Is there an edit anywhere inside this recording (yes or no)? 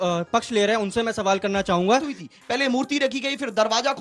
yes